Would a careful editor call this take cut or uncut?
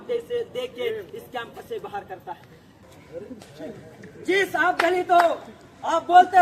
cut